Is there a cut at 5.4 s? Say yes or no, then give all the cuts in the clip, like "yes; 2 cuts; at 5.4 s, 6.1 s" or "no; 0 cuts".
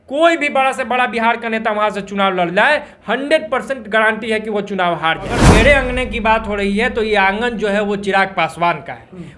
yes; 1 cut; at 5.4 s